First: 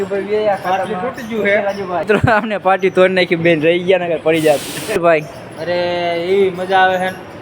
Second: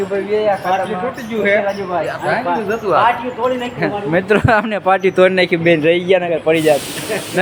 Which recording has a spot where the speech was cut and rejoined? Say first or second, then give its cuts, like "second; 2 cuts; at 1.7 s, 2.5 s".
first; 2 cuts; at 2.0 s, 5.0 s